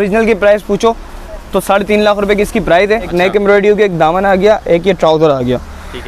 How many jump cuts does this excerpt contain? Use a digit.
1